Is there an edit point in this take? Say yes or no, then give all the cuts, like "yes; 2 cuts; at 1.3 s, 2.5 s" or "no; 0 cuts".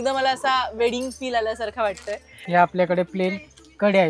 yes; 1 cut; at 2.3 s